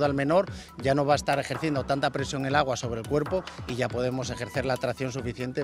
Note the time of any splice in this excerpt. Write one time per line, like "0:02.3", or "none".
none